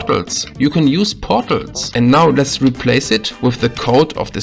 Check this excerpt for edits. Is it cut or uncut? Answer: cut